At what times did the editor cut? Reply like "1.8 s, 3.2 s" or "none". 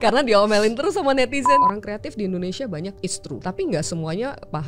1.6 s, 3.2 s

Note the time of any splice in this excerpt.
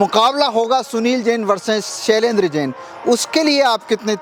none

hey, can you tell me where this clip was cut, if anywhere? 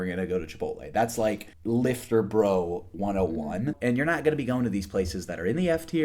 1.5 s, 3.8 s

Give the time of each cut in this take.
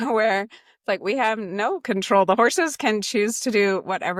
none

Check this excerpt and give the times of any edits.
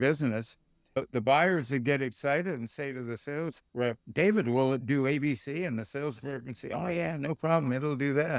1.2 s

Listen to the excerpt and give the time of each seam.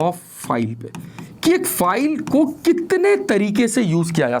none

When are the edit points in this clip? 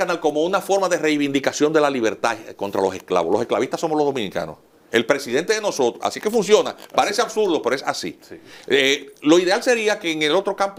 none

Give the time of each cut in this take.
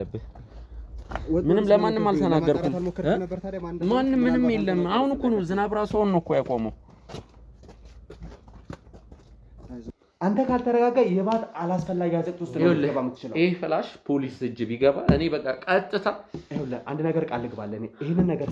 10.0 s

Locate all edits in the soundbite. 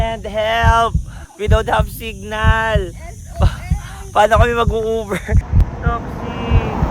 5.4 s

